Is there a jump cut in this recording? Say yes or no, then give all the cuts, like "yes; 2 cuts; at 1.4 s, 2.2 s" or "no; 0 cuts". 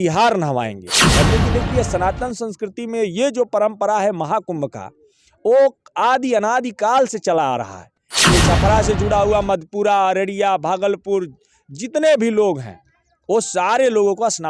yes; 2 cuts; at 1.2 s, 8.3 s